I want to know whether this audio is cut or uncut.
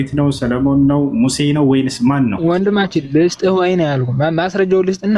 uncut